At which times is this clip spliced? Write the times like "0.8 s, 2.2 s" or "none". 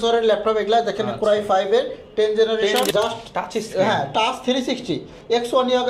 2.9 s